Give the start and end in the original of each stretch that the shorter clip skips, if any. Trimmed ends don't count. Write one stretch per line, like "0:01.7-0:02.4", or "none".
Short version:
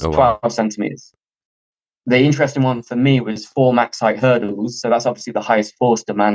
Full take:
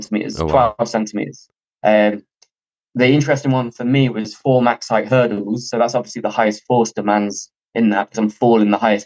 0:01.7-0:02.2